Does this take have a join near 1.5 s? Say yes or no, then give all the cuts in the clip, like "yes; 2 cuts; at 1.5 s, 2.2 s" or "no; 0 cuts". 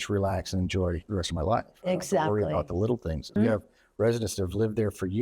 no; 1 cut; at 3.3 s